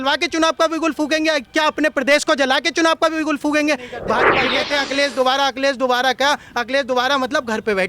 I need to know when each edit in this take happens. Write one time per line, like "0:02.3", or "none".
0:04.4